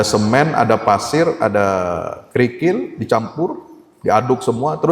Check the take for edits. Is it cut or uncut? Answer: uncut